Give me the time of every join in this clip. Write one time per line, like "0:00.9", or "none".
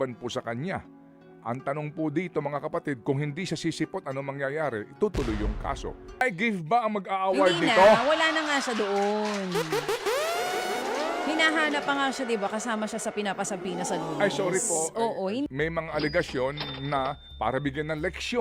0:06.2
0:15.5